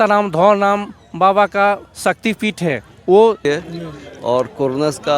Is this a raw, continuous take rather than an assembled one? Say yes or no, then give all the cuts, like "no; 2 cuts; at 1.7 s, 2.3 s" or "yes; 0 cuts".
no; 1 cut; at 3.4 s